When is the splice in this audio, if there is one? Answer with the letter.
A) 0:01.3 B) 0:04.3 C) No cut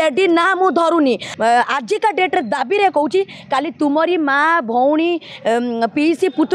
A